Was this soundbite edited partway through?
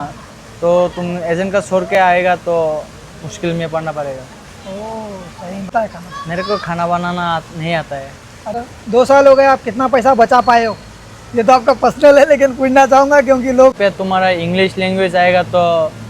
yes; 3 cuts; at 5.7 s, 8.6 s, 13.8 s

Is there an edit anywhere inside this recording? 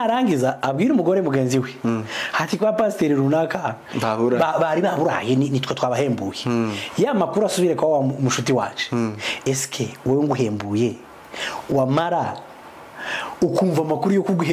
no; 0 cuts

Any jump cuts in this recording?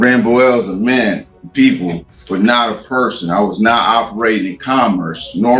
no; 0 cuts

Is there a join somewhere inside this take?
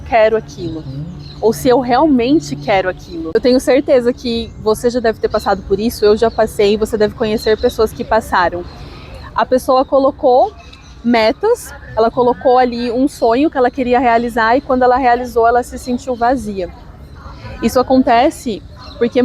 yes; 1 cut; at 3.1 s

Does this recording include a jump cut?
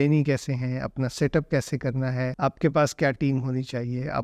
yes; 1 cut; at 2.3 s

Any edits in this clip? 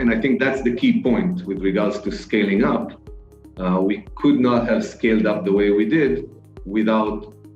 no; 0 cuts

